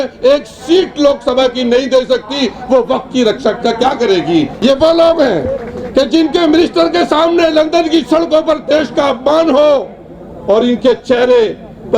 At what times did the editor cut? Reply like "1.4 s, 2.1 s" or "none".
4.5 s